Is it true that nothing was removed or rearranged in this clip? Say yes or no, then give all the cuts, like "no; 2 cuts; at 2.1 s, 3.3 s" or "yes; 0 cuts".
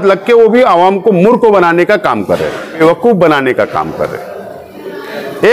no; 1 cut; at 2.8 s